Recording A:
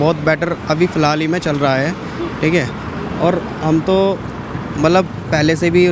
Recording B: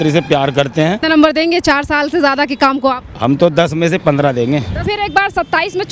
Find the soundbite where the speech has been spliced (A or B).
B